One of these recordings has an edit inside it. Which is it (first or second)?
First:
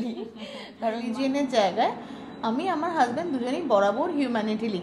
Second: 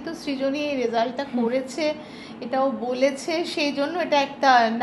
first